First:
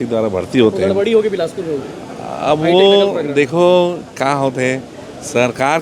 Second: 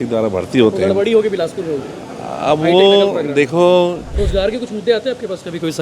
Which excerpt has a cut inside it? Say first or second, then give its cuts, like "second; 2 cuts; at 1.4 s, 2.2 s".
second; 1 cut; at 4.1 s